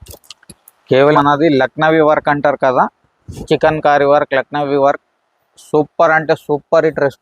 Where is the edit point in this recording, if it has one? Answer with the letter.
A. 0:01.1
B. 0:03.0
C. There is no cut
A